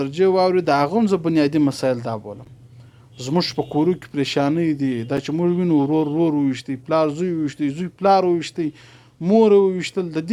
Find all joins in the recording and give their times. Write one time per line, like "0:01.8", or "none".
none